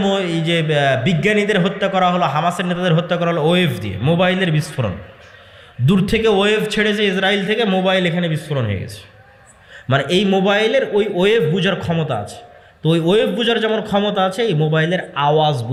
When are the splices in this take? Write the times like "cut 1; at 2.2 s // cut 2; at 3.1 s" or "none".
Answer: none